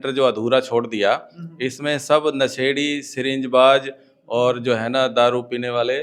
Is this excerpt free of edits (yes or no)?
yes